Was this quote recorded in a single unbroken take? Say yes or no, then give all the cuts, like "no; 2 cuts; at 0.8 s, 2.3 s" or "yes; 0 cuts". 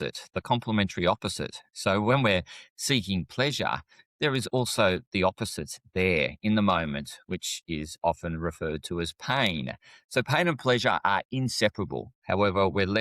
no; 1 cut; at 12.1 s